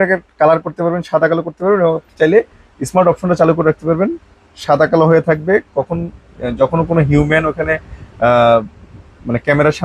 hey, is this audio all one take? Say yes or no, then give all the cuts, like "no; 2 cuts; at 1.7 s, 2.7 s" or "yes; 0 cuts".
yes; 0 cuts